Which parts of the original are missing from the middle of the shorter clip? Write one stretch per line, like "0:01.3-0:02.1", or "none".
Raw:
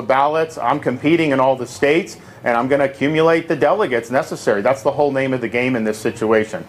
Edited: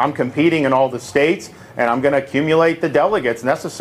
none